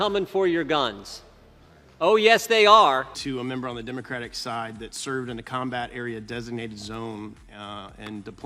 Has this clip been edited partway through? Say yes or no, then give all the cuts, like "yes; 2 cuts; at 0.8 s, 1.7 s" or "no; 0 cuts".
no; 0 cuts